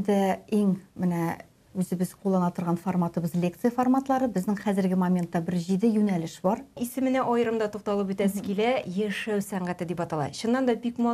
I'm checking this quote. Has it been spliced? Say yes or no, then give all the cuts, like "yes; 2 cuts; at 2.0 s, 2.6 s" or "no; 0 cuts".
yes; 1 cut; at 6.9 s